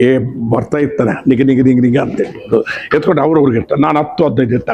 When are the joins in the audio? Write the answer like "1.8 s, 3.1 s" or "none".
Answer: 2.4 s